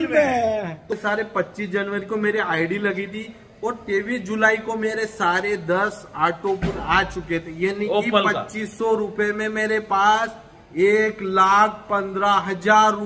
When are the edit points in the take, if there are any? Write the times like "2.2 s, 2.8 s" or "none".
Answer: 0.9 s